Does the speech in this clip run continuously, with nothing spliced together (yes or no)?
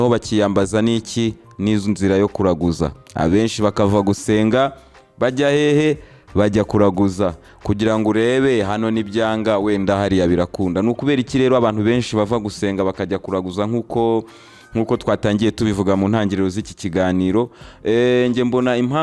yes